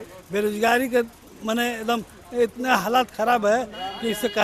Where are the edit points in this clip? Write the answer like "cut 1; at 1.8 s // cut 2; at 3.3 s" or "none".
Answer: none